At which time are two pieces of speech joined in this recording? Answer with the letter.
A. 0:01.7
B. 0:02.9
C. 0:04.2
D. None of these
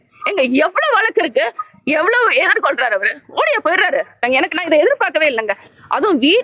C